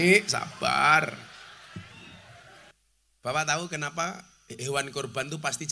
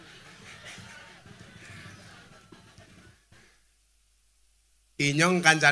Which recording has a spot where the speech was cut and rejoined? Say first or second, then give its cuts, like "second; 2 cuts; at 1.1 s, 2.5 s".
first; 1 cut; at 2.7 s